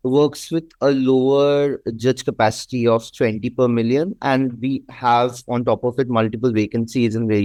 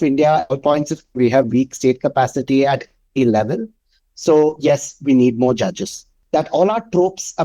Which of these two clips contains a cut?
second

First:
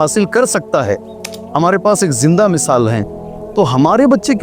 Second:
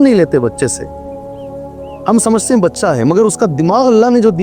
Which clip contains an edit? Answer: second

